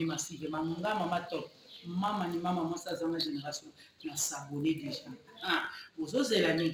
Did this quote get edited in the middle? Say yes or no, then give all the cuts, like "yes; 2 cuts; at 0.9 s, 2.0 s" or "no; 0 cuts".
yes; 1 cut; at 1.3 s